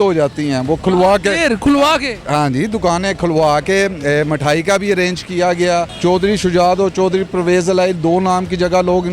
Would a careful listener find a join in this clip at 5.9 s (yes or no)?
yes